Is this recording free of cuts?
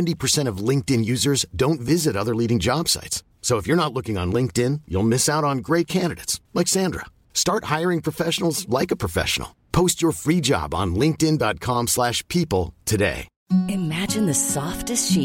no; 1 cut; at 13.3 s

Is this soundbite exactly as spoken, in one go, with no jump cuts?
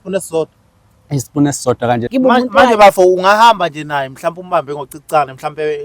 no; 1 cut; at 2.1 s

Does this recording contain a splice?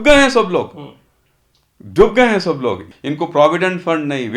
yes; 1 cut; at 2.9 s

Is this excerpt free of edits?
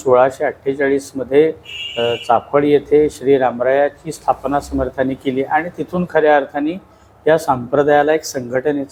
yes; 0 cuts

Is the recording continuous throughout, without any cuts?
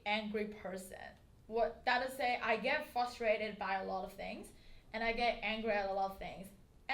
yes; 0 cuts

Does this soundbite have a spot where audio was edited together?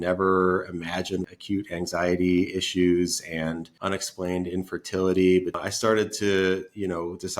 yes; 3 cuts; at 1.3 s, 3.7 s, 5.6 s

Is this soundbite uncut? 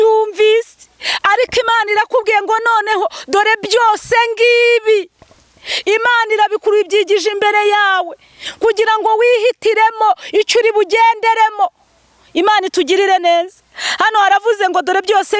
yes; 0 cuts

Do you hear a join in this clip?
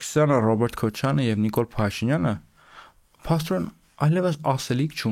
no; 0 cuts

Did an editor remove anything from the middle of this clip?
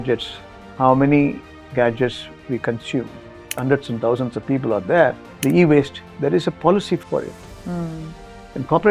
yes; 3 cuts; at 3.5 s, 5.3 s, 7.0 s

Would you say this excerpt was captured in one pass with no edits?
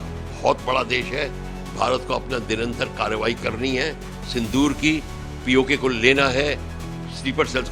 yes; 0 cuts

